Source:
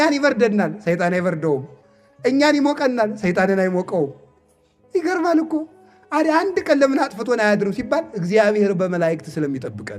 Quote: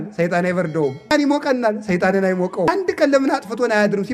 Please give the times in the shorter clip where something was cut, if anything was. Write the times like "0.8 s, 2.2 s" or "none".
1.1 s, 2.7 s